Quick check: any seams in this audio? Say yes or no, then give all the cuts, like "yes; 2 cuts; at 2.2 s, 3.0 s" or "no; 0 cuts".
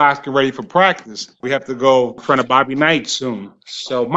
yes; 2 cuts; at 1.4 s, 2.2 s